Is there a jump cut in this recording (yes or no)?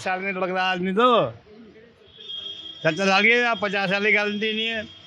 no